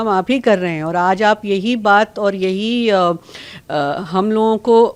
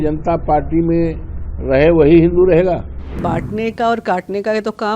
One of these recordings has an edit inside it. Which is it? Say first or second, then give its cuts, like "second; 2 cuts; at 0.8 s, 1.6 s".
second; 1 cut; at 3.2 s